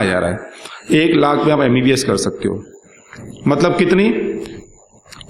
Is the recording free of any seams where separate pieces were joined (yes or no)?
yes